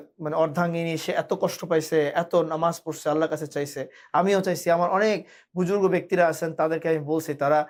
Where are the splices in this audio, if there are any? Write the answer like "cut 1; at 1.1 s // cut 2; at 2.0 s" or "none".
none